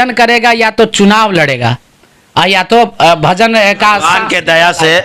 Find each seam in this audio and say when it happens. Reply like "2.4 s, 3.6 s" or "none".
none